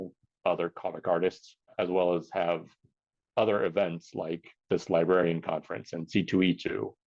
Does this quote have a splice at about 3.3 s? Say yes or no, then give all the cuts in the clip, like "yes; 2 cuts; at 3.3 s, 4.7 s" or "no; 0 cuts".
no; 2 cuts; at 1.7 s, 4.5 s